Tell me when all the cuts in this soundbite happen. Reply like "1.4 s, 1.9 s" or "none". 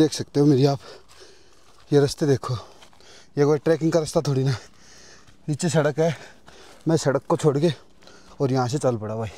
none